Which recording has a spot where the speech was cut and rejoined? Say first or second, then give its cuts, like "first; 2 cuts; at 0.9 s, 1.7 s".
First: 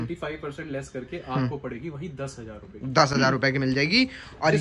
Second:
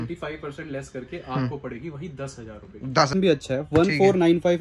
second; 1 cut; at 3.1 s